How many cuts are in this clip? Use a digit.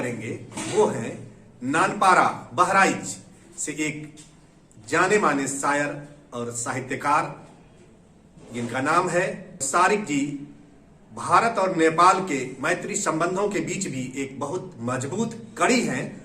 1